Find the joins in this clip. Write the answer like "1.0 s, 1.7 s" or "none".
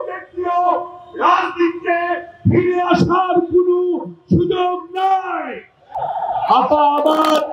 6.0 s